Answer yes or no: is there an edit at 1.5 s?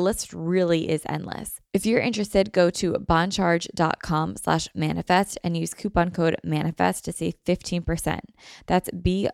yes